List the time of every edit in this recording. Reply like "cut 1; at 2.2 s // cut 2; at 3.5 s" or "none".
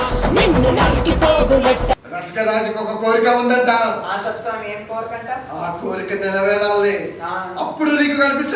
cut 1; at 2.3 s